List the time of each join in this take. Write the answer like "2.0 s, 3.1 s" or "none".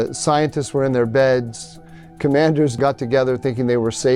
2.8 s